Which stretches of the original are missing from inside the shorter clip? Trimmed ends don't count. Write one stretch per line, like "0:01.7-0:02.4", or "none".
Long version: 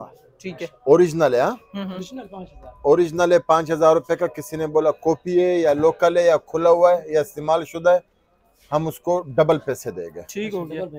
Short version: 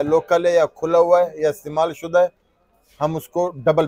none